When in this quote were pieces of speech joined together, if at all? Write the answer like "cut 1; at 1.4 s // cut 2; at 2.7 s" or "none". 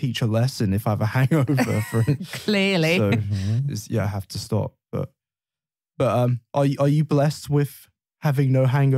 none

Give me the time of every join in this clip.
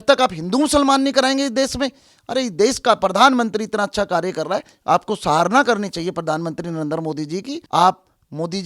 cut 1; at 7.6 s

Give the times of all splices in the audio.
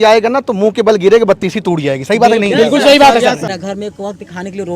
cut 1; at 3.4 s

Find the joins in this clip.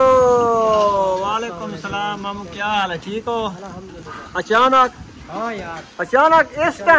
none

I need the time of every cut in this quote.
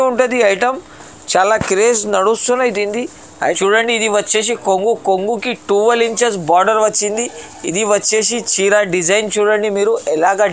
cut 1; at 3.6 s

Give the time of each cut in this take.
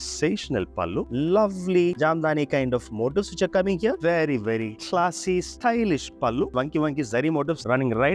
cut 1; at 1.1 s // cut 2; at 4.0 s

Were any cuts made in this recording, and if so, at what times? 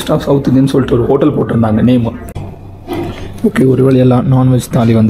cut 1; at 2.2 s

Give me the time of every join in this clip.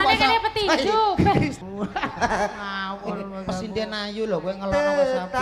cut 1; at 1.6 s

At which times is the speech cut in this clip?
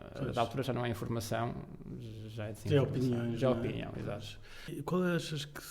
cut 1; at 4.8 s

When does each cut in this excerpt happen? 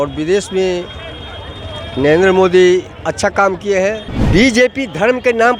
cut 1; at 4.1 s

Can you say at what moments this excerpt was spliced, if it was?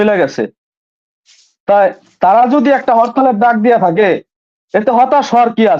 none

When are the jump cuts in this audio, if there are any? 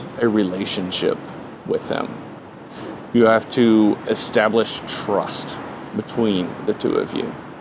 none

